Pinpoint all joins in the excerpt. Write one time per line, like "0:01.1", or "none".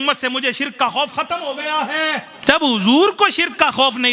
0:02.3